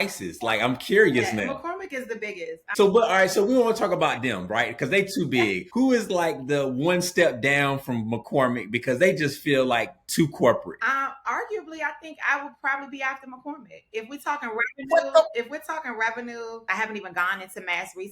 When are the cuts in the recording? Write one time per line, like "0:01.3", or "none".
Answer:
0:02.6
0:05.6
0:16.6